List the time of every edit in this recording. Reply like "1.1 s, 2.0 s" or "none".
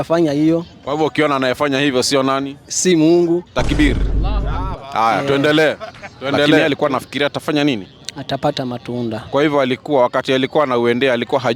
6.6 s